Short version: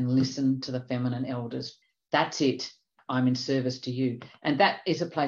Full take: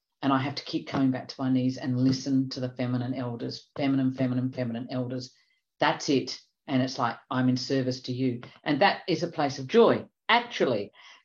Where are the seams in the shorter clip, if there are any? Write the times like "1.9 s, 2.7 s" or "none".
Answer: 1.7 s, 3.0 s